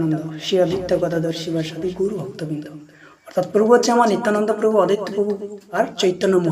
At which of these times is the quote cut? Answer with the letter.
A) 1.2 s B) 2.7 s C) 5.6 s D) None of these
C